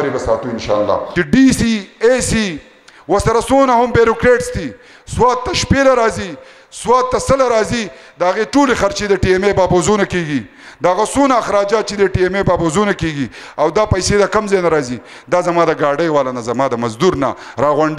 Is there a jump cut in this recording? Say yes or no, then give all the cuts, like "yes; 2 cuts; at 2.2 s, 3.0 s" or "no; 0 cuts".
yes; 1 cut; at 1.1 s